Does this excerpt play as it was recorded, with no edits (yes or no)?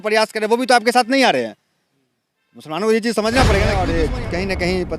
no